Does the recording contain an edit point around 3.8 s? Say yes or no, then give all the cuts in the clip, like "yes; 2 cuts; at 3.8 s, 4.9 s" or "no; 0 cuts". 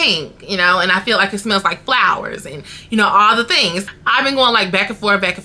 yes; 1 cut; at 3.8 s